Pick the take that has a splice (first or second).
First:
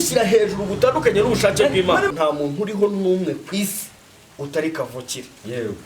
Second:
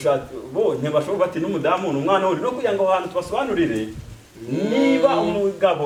first